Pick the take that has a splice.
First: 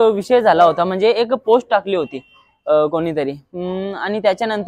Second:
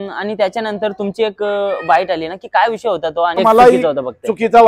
second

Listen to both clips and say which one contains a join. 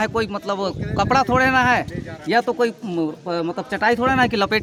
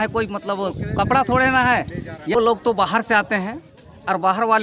second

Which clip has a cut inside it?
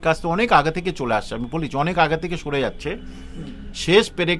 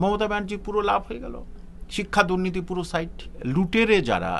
second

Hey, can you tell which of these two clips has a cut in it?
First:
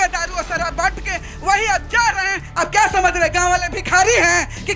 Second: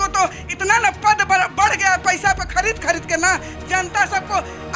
first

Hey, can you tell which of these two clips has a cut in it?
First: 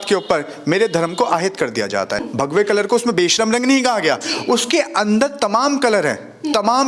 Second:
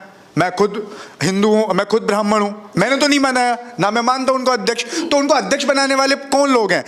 first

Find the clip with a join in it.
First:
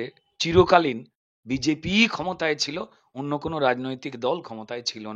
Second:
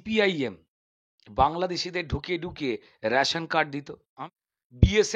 second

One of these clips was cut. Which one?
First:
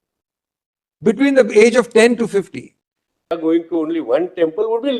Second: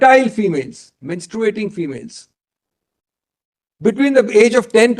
first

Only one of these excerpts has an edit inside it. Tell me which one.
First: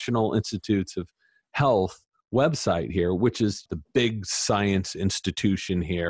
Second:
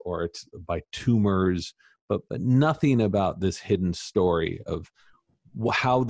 first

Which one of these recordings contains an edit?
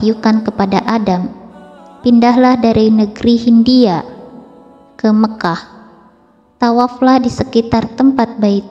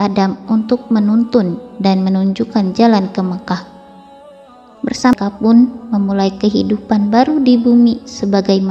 second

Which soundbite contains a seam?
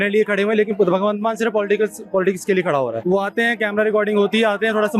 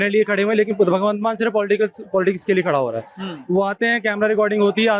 first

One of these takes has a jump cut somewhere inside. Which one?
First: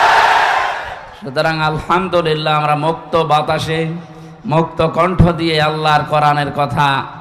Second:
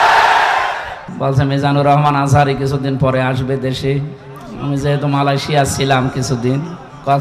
second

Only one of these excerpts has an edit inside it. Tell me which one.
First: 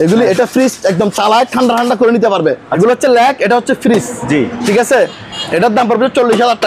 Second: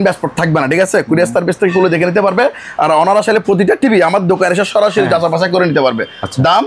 first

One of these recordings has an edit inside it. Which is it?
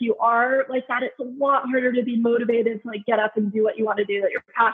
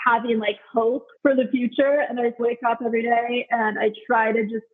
second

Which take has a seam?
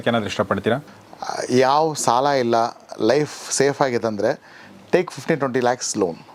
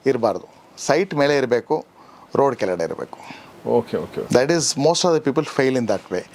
first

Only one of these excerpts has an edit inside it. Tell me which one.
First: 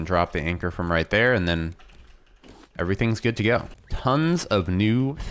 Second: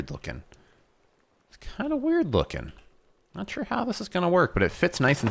first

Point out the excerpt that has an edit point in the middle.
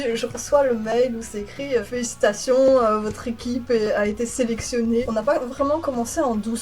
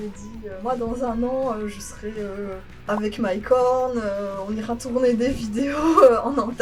first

